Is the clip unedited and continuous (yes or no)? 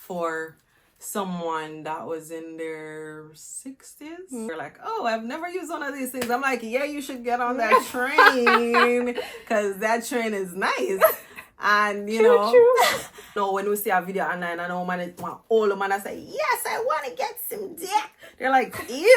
no